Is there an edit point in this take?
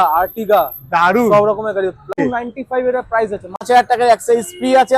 yes; 2 cuts; at 2.2 s, 3.7 s

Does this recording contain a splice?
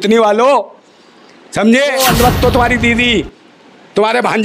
yes; 1 cut; at 2.0 s

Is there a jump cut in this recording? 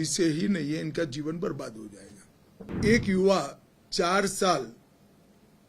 yes; 1 cut; at 2.7 s

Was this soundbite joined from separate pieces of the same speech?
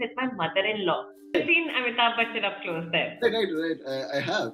yes; 1 cut; at 1.3 s

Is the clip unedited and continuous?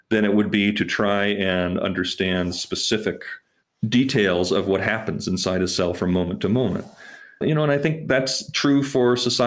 yes; 0 cuts

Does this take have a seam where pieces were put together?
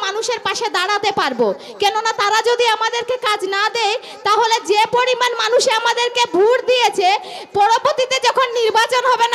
no; 0 cuts

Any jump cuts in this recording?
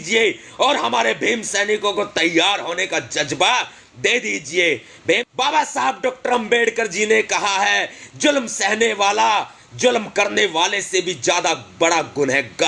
yes; 1 cut; at 5.2 s

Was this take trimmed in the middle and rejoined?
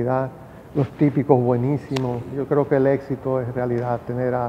yes; 1 cut; at 2.3 s

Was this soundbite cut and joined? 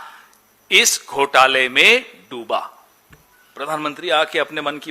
yes; 1 cut; at 3.1 s

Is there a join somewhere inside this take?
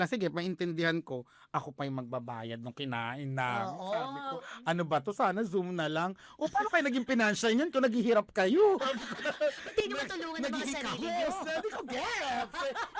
no; 0 cuts

